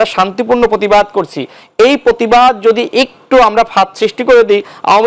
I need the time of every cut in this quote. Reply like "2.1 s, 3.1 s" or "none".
none